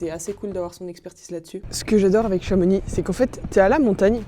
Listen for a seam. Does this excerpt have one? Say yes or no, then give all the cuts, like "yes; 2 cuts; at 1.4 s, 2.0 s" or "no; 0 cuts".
yes; 1 cut; at 1.7 s